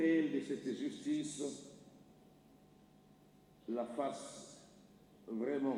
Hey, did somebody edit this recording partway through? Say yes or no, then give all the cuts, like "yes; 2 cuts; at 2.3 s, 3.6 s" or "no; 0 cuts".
no; 0 cuts